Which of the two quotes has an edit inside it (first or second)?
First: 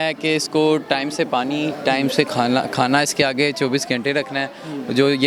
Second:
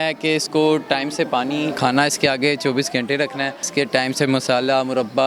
second